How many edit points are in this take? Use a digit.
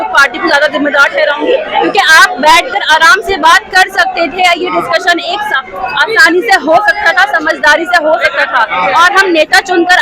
0